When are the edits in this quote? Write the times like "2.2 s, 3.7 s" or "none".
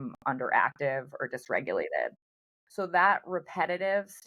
none